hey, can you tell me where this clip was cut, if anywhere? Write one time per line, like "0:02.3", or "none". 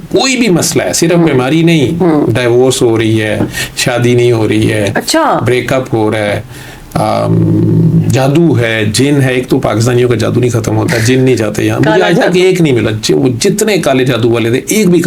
none